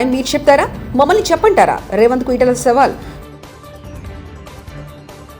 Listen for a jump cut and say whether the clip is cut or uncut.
uncut